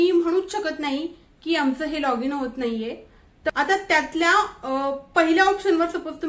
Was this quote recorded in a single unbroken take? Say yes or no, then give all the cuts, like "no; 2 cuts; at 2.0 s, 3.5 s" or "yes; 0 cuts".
no; 1 cut; at 3.5 s